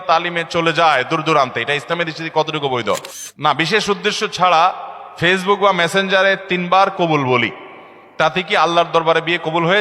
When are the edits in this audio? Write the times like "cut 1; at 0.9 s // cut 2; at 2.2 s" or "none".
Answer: cut 1; at 3.2 s